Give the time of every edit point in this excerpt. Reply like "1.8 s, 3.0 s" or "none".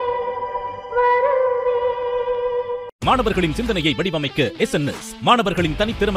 2.9 s